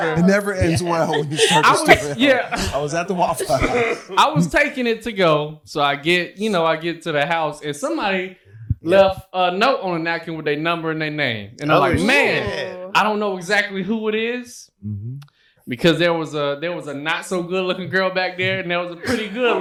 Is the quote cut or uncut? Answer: uncut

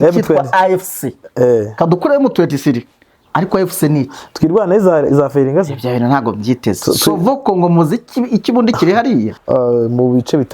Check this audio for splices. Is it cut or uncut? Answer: cut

